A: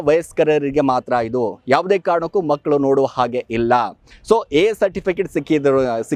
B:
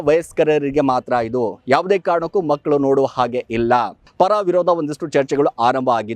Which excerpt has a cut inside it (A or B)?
B